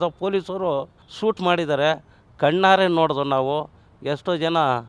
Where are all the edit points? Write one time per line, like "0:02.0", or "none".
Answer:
0:01.0